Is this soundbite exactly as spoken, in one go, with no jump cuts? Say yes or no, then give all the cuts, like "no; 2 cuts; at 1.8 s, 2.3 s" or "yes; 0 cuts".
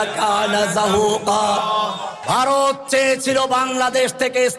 no; 1 cut; at 2.1 s